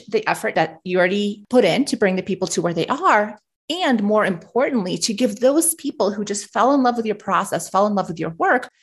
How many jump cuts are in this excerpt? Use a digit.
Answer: 1